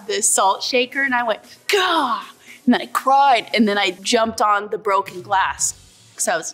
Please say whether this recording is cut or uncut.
uncut